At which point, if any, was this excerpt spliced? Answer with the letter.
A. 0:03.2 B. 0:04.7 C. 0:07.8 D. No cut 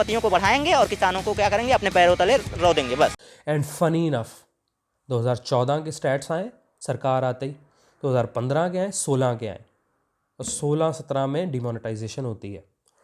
A